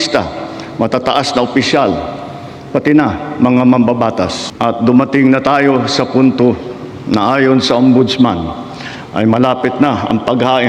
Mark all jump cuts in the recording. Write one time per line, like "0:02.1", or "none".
0:04.4